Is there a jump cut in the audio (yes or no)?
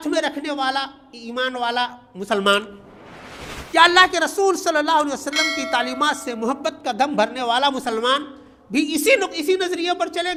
no